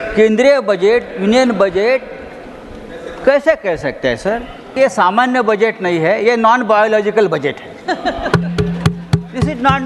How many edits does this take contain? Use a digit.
1